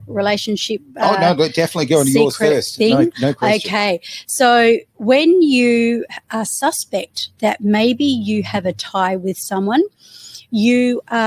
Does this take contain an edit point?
no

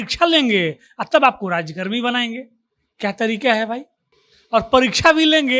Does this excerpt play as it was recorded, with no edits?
yes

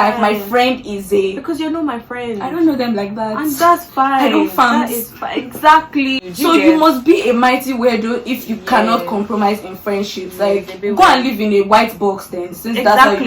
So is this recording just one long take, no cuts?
no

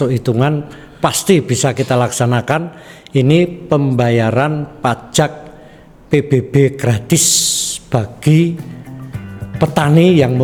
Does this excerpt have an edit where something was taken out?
no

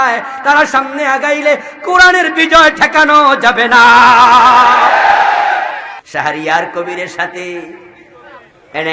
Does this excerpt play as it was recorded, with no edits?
no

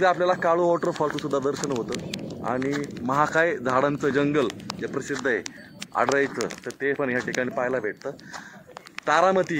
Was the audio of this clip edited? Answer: no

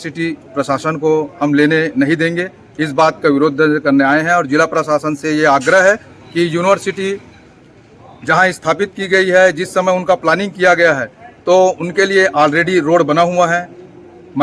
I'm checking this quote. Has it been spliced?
no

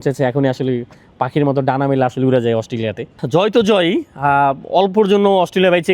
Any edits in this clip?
yes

